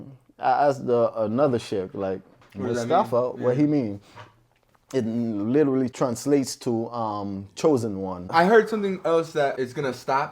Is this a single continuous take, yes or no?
no